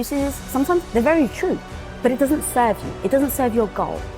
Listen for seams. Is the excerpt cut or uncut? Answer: cut